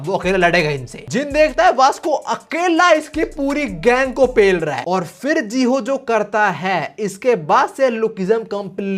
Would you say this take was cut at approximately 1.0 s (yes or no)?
yes